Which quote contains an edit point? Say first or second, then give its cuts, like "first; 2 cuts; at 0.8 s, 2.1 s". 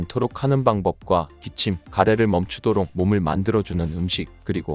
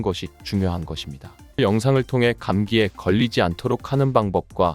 second; 1 cut; at 1.6 s